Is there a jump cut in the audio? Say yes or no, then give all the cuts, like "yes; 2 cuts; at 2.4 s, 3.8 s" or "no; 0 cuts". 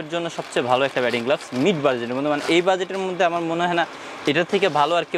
no; 0 cuts